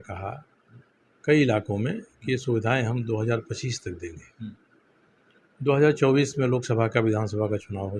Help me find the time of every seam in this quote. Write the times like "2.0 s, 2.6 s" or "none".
none